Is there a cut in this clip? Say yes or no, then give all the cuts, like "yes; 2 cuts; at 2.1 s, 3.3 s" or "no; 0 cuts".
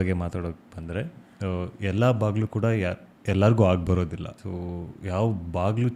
yes; 1 cut; at 4.3 s